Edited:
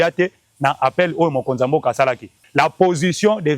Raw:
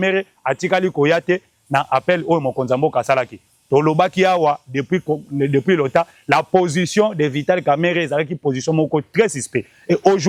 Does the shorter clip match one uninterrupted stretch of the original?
no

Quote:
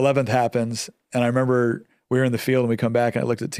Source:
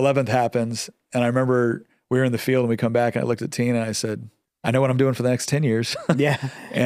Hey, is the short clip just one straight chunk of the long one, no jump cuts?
yes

